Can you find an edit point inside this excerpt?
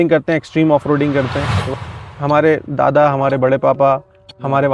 yes; 1 cut; at 1.8 s

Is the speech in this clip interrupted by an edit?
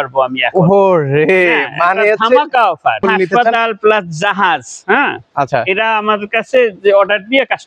yes; 1 cut; at 3.0 s

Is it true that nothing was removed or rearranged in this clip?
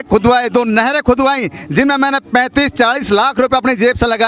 yes; 0 cuts

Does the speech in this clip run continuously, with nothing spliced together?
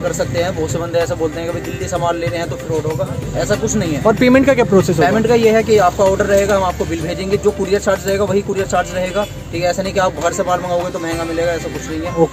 yes; 0 cuts

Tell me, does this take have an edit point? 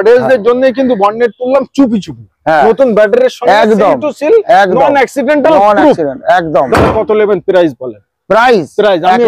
no; 0 cuts

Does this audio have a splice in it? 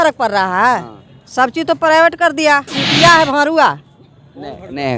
yes; 1 cut; at 2.8 s

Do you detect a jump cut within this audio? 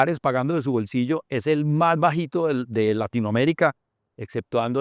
no; 0 cuts

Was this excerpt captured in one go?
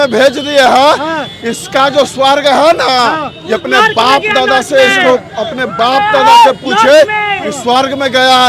yes; 0 cuts

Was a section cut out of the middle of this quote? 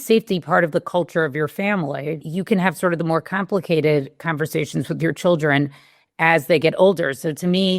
yes; 1 cut; at 2.2 s

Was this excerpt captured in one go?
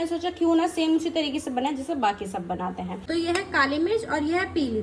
no; 1 cut; at 3.0 s

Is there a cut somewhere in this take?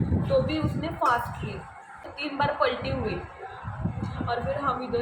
yes; 1 cut; at 2.1 s

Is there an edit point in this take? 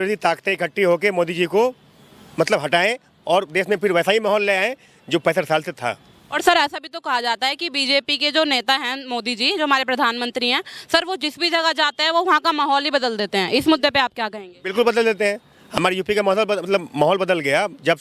no; 0 cuts

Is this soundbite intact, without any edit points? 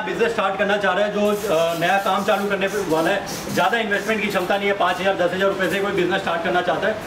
yes; 0 cuts

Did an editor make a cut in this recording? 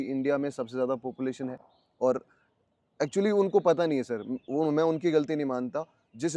no; 0 cuts

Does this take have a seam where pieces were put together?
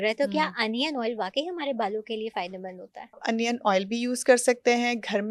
yes; 1 cut; at 3.2 s

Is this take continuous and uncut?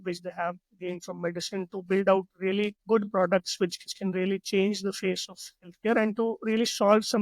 no; 2 cuts; at 2.8 s, 3.8 s

